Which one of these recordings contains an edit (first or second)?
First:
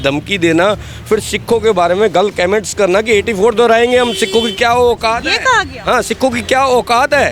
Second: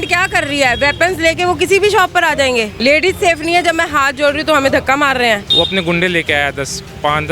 second